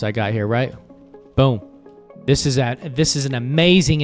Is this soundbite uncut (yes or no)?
yes